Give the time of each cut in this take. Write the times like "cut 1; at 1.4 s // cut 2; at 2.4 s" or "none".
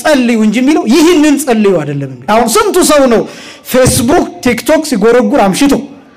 cut 1; at 2.2 s